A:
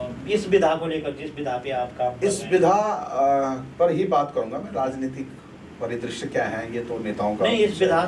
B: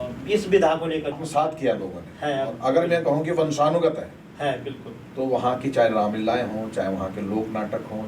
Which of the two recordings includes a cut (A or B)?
B